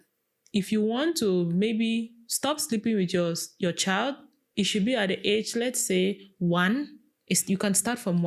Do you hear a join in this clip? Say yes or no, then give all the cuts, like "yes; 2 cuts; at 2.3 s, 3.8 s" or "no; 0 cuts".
no; 0 cuts